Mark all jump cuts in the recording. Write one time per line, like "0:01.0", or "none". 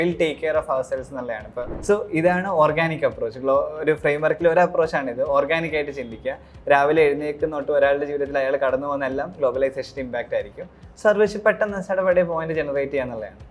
0:01.7